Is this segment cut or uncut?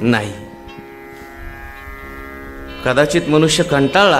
uncut